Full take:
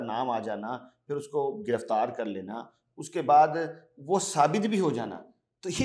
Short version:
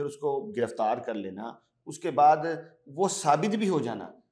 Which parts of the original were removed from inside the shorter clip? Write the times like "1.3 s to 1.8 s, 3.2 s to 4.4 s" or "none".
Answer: none